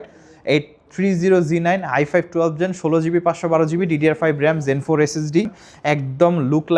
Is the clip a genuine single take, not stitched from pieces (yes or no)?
no